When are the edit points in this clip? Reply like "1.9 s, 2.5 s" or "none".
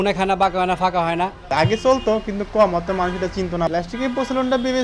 1.5 s, 3.7 s